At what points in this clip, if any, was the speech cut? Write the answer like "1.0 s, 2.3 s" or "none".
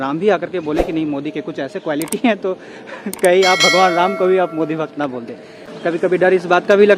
none